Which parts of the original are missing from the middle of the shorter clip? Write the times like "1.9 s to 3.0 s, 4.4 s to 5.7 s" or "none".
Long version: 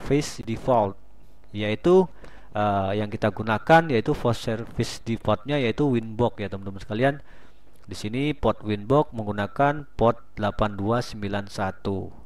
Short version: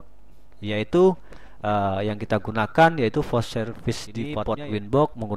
5.3 s to 8.3 s